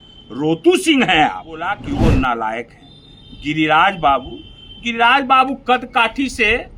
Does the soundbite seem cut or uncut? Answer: cut